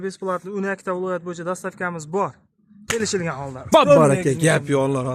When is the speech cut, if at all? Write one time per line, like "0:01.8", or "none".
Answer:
none